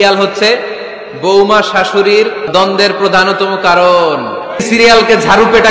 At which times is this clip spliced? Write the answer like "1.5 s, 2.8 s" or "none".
2.5 s, 4.6 s